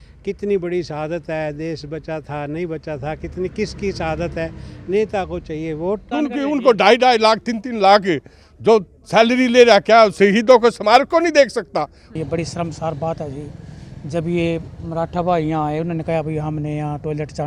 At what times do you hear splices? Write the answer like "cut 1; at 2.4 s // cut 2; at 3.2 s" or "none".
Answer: cut 1; at 6.1 s // cut 2; at 12.1 s